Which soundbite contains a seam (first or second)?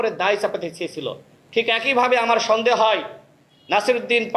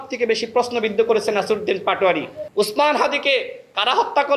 second